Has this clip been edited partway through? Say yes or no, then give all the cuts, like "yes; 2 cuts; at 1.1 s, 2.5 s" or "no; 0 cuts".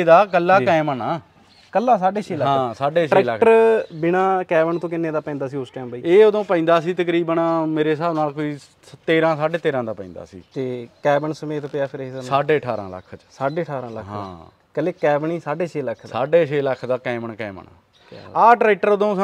no; 0 cuts